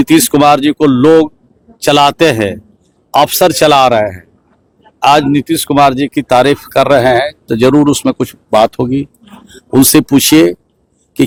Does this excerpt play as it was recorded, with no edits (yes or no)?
yes